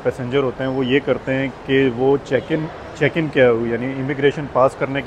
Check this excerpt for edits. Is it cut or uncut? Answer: uncut